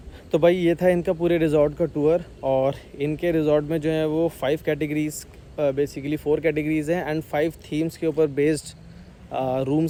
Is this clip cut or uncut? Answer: uncut